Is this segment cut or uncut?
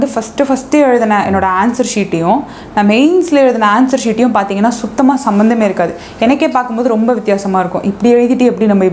uncut